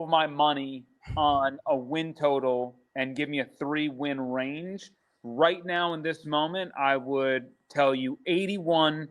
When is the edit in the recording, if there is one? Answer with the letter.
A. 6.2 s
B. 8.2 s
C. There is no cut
B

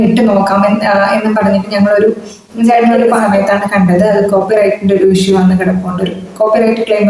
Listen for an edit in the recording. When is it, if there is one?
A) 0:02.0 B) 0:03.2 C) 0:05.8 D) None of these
B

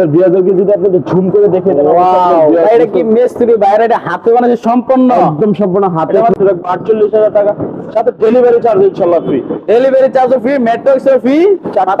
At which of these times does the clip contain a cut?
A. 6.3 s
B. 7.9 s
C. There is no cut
A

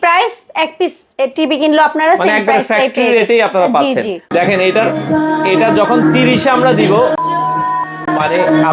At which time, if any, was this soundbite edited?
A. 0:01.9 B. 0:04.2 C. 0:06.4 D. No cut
B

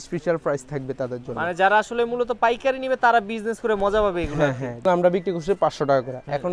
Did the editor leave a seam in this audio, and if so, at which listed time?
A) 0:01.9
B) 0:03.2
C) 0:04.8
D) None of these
C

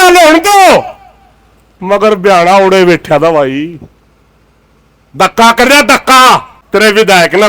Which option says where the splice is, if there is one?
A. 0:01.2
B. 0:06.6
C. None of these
B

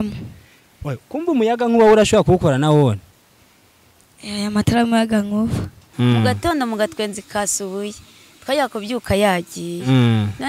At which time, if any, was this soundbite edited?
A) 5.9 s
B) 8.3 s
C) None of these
A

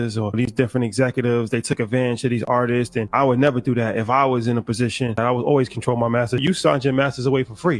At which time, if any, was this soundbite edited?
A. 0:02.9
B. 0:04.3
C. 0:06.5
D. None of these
D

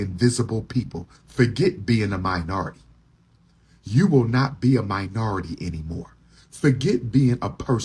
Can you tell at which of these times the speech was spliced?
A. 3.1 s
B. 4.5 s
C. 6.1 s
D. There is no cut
D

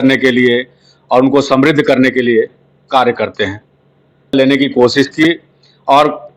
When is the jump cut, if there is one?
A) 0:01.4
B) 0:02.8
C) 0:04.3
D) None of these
C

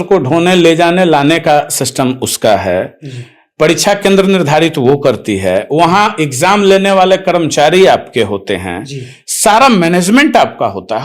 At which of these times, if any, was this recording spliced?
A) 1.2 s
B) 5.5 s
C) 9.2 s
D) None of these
D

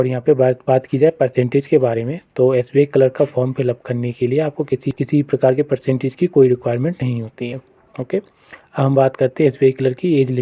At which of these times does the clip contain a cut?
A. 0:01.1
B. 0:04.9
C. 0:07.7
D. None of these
B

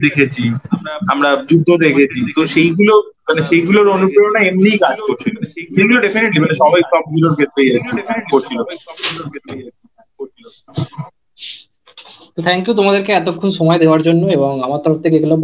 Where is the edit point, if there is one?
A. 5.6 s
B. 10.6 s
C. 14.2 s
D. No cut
D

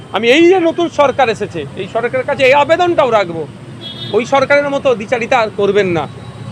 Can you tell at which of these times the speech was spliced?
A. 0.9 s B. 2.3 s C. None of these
C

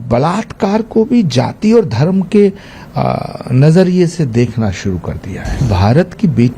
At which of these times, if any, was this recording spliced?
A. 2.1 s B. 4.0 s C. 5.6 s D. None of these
C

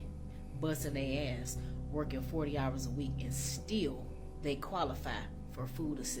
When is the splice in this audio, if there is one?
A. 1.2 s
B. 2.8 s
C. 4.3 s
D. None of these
D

